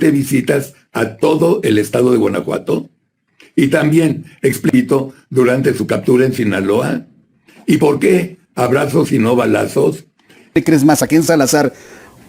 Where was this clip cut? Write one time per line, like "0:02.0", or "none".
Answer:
0:04.7
0:10.5